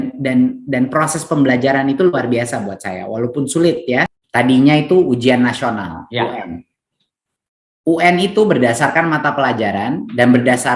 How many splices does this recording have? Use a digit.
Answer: 1